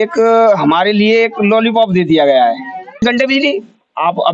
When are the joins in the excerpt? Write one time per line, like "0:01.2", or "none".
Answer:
0:03.0